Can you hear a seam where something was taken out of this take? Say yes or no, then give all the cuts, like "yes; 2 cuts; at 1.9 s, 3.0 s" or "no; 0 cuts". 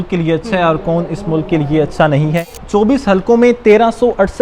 yes; 1 cut; at 2.6 s